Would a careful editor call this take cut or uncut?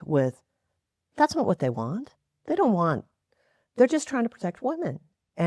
uncut